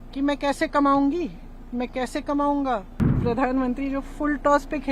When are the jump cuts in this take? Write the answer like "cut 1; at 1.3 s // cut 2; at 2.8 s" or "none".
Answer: cut 1; at 3.2 s